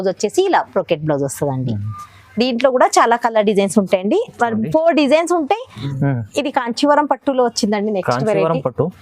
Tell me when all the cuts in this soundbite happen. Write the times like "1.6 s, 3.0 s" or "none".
5.8 s